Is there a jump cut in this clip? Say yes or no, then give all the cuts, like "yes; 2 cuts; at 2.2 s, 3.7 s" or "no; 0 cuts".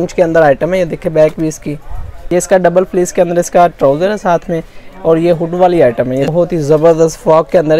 yes; 2 cuts; at 2.1 s, 6.3 s